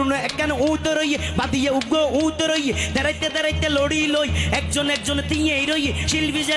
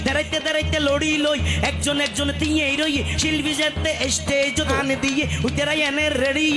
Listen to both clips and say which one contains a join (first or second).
second